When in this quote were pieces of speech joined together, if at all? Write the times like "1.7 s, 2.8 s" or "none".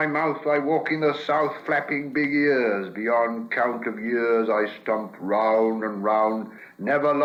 none